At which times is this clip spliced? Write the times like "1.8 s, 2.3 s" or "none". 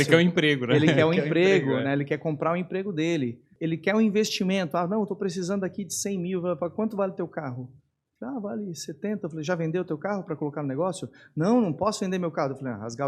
3.5 s